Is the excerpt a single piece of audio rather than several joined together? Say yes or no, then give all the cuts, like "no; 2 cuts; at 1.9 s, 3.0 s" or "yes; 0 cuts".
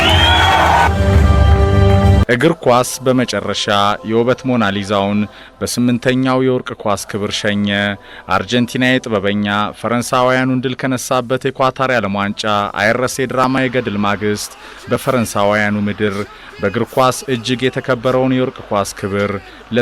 no; 1 cut; at 2.2 s